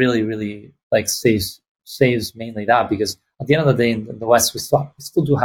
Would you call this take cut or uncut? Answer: uncut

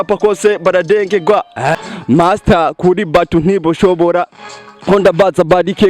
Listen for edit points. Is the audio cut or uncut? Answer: cut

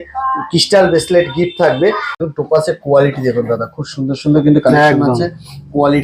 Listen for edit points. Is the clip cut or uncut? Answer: cut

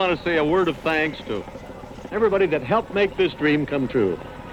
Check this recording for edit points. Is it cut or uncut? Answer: uncut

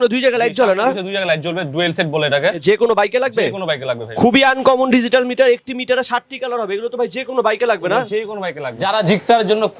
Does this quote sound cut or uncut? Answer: cut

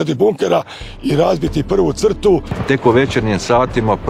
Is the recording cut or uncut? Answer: cut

